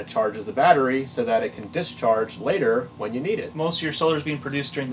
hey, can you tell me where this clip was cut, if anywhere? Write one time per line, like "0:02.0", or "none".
0:03.5